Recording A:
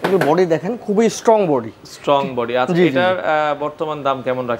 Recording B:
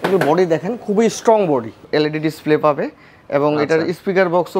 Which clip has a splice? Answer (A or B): B